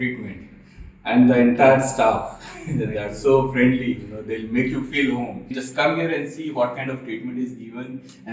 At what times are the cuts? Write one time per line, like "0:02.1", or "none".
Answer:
0:05.6